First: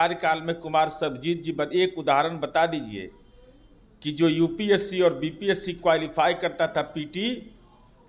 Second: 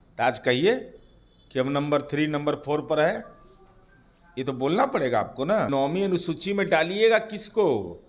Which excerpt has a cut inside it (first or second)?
second